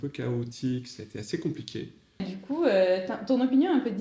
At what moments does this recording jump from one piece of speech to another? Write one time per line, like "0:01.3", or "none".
0:02.3